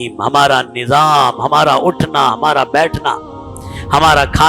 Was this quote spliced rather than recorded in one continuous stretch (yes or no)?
no